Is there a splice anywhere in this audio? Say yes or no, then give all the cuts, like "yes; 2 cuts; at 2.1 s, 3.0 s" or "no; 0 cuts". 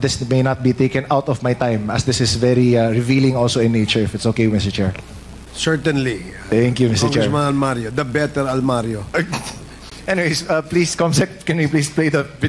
no; 0 cuts